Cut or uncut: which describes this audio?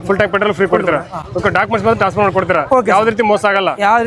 uncut